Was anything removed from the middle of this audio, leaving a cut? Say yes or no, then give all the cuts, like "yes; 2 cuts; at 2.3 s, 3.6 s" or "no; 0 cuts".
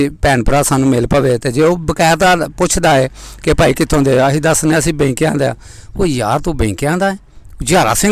no; 0 cuts